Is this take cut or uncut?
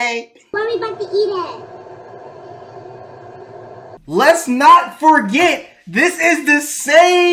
cut